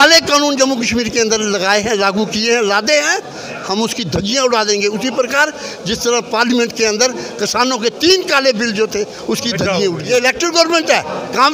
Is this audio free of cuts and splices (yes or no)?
no